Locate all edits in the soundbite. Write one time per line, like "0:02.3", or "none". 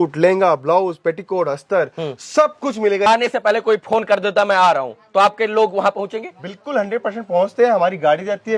0:03.1